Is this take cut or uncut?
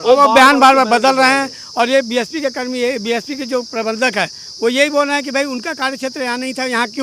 uncut